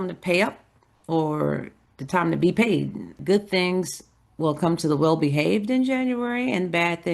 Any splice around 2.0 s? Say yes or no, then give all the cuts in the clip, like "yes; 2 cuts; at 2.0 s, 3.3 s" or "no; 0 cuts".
no; 1 cut; at 3.2 s